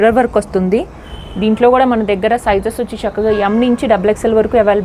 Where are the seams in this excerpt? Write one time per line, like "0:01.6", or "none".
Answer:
none